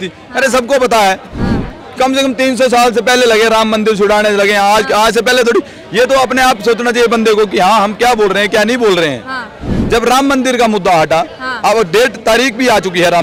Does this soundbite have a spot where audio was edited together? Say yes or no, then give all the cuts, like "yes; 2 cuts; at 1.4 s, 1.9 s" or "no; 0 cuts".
no; 0 cuts